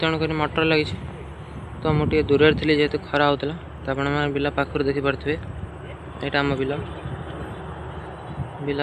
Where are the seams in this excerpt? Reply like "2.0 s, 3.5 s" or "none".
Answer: none